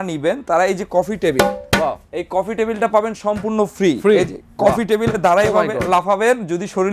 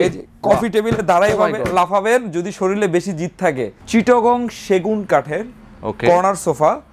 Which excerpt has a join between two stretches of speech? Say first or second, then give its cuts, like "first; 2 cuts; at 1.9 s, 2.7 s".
second; 1 cut; at 3.7 s